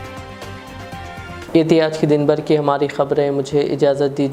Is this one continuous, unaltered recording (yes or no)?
yes